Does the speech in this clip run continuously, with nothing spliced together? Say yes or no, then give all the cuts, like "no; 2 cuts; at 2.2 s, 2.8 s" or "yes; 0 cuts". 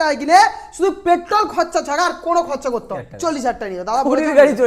no; 1 cut; at 3.0 s